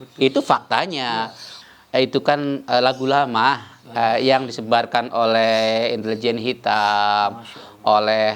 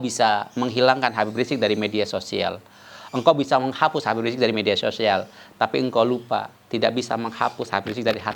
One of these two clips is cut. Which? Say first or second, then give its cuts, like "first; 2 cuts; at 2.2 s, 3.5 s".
first; 1 cut; at 1.5 s